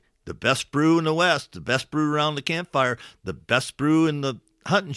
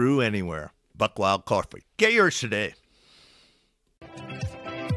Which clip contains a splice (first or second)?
second